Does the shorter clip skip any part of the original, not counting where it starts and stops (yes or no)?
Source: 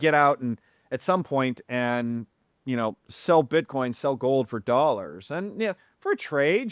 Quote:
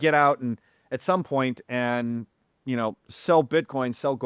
no